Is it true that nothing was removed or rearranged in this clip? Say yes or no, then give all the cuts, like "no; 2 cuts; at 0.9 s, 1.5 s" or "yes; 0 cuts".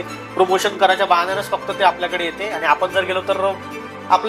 yes; 0 cuts